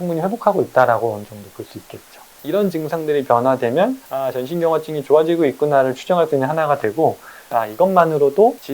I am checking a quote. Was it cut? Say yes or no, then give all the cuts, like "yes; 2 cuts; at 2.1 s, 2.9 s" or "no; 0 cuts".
yes; 3 cuts; at 2.3 s, 4.1 s, 7.5 s